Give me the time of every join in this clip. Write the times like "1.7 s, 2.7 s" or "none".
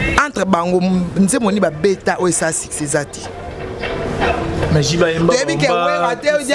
none

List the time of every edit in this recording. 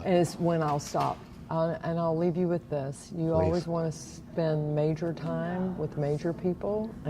1.3 s

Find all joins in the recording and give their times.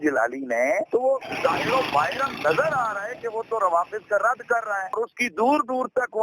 1.3 s, 4.9 s

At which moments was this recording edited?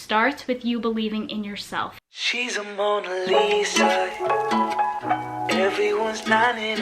1.9 s

